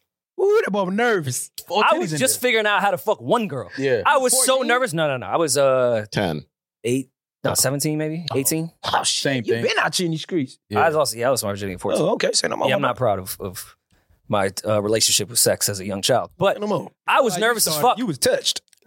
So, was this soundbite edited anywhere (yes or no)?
yes